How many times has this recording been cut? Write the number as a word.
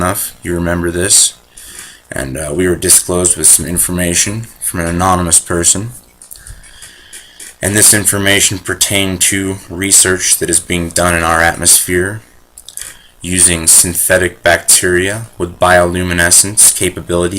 one